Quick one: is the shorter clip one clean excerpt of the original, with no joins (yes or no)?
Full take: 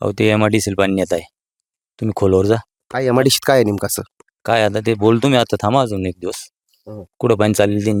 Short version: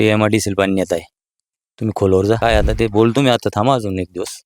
no